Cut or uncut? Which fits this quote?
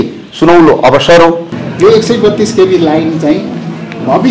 cut